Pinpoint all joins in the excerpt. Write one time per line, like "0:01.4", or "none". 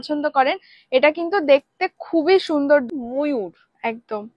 0:02.9